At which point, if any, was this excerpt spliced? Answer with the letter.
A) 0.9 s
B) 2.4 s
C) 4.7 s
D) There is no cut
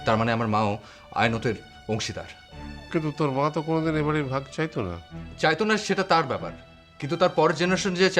D